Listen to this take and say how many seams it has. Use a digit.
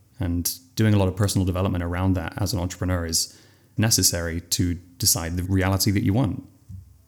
1